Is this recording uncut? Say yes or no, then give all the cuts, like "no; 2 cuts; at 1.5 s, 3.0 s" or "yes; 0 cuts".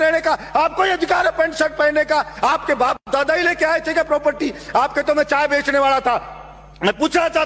yes; 0 cuts